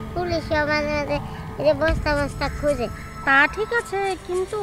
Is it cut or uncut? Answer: cut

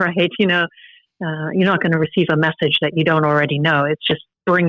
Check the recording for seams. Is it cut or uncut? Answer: uncut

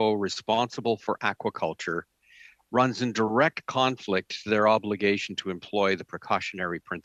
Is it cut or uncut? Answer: uncut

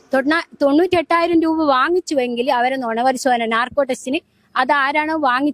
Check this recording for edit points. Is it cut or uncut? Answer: uncut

